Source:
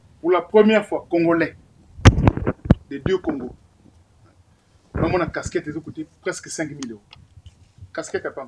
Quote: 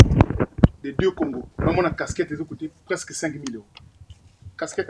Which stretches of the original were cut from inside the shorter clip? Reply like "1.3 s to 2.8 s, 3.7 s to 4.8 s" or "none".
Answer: 3.5 s to 4.8 s